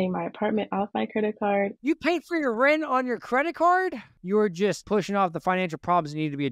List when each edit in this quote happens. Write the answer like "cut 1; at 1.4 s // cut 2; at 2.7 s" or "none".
cut 1; at 1.8 s // cut 2; at 4.4 s

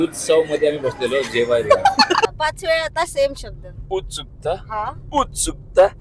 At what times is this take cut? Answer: cut 1; at 2.3 s

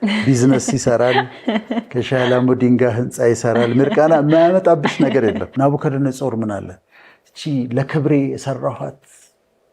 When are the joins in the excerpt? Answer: cut 1; at 5.5 s

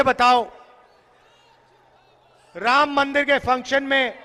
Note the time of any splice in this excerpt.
none

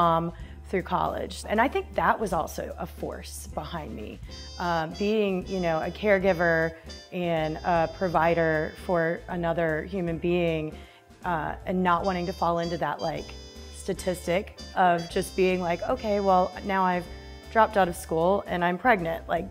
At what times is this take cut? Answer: cut 1; at 1.4 s

